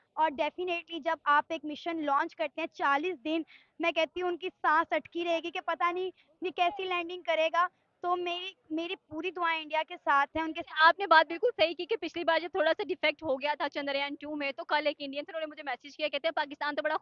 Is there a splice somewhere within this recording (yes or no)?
no